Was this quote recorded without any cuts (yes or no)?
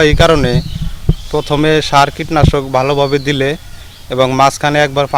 yes